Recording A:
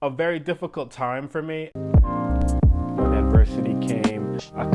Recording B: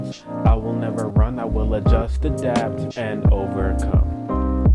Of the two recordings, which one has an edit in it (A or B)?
A